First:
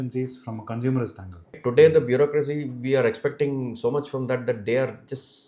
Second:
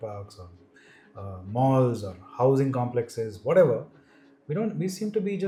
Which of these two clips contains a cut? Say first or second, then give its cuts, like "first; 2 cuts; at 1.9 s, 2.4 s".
first; 1 cut; at 1.6 s